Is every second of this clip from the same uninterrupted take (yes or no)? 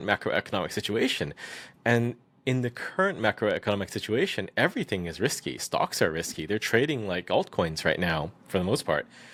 yes